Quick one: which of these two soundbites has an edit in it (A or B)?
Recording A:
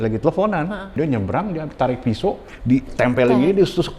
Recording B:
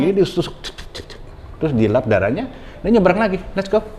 A